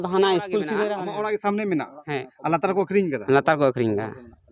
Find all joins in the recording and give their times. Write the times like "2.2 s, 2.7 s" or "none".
0.9 s